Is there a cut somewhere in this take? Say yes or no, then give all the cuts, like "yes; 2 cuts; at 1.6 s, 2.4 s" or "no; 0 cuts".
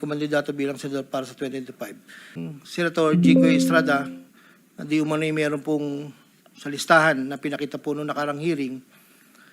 yes; 1 cut; at 2.4 s